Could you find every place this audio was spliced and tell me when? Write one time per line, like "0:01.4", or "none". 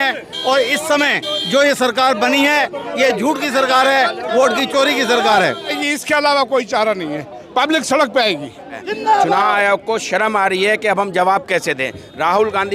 0:05.8
0:08.9